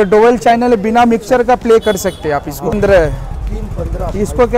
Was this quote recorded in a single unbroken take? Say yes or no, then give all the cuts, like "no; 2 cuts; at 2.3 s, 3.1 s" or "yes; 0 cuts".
no; 1 cut; at 2.7 s